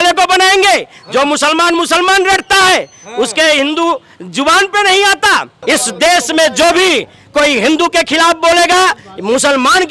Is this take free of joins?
no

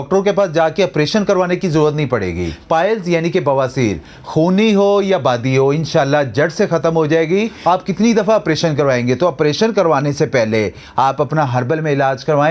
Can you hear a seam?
yes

